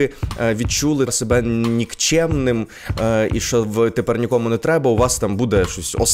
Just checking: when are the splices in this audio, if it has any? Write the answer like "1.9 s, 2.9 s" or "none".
1.1 s